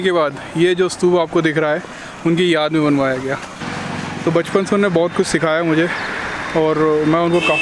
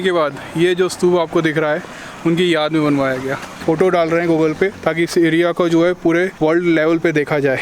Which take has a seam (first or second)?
second